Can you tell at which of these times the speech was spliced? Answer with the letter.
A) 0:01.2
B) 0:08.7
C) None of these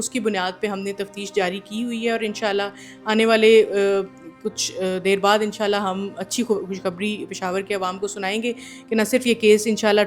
C